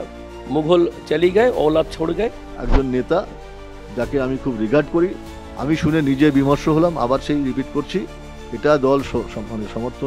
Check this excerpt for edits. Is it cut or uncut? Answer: cut